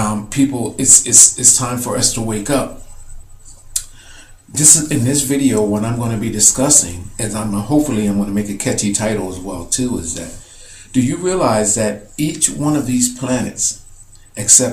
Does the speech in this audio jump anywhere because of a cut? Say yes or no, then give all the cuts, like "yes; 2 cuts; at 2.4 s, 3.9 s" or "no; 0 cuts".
yes; 1 cut; at 1.7 s